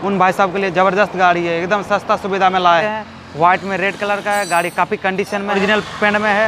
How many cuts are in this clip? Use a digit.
2